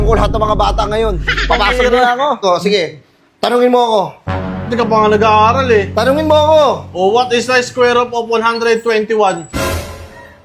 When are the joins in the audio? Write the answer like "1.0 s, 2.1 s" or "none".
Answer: 2.4 s